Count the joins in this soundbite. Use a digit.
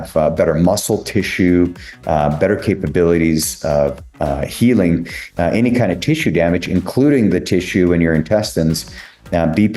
0